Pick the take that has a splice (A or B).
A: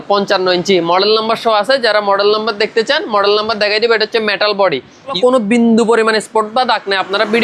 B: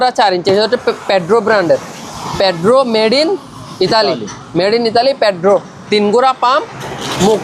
A